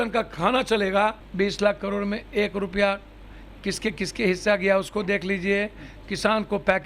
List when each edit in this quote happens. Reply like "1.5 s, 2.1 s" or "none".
1.2 s